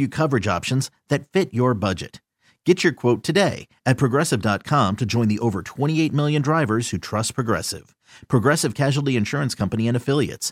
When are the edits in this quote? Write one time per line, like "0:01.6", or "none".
none